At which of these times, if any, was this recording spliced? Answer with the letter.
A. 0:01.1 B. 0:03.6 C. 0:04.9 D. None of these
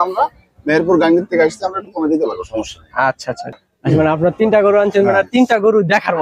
B